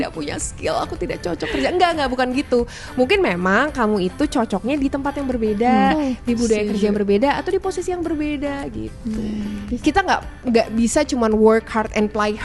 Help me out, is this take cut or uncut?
cut